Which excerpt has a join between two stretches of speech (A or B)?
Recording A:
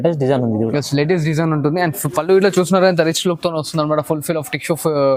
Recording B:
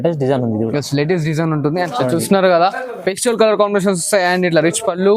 B